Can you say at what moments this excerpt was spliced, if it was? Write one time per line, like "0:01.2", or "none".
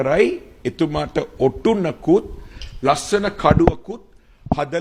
none